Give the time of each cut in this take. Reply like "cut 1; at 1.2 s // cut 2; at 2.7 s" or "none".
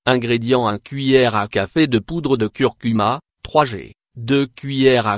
cut 1; at 2.2 s // cut 2; at 4.1 s